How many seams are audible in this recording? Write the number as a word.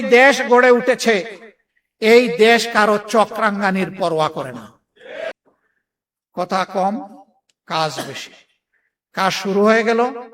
one